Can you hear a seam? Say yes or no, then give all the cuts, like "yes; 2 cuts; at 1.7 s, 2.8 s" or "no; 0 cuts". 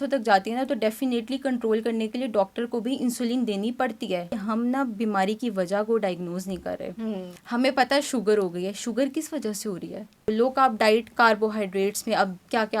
yes; 3 cuts; at 4.3 s, 7.3 s, 10.3 s